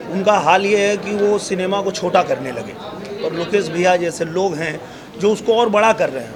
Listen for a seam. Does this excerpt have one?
no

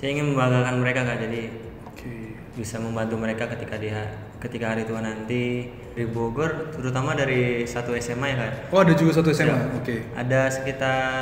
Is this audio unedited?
no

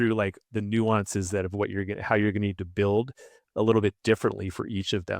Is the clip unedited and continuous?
yes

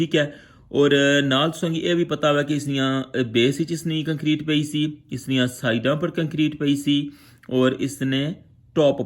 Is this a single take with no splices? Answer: yes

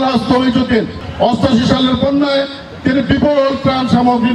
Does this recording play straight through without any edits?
no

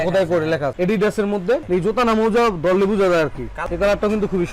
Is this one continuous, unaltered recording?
no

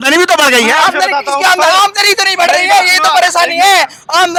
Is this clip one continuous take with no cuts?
yes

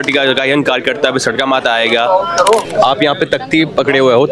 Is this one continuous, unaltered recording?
no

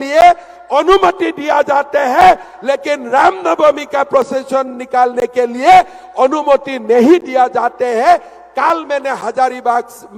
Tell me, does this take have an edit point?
no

